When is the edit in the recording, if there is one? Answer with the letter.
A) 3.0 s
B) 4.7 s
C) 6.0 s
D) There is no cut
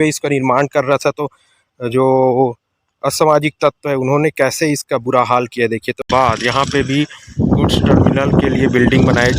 C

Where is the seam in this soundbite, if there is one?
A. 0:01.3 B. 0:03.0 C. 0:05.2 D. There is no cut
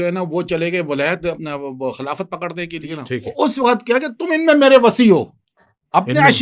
B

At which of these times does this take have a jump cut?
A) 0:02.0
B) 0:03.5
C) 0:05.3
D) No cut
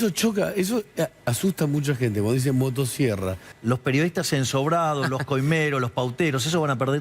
B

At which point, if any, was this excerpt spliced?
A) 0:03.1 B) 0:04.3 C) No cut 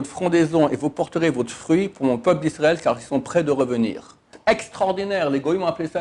B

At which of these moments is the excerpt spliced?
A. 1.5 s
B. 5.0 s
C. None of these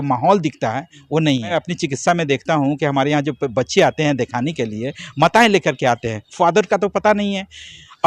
A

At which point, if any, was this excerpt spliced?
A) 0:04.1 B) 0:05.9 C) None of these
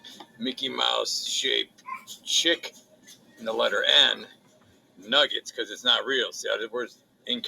B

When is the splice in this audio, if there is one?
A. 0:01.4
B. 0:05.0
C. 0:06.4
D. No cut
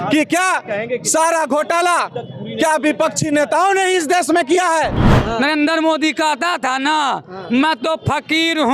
B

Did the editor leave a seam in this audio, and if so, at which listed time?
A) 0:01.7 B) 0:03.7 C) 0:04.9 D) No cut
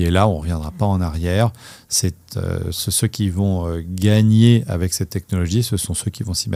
D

